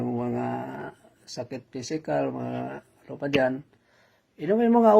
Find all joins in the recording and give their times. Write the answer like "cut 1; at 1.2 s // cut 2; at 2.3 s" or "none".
cut 1; at 3.6 s